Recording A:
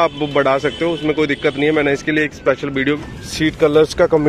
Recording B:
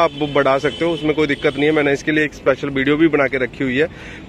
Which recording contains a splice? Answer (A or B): A